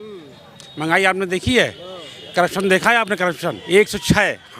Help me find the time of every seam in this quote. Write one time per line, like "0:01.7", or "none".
0:03.5